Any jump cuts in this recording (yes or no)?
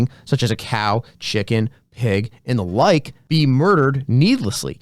yes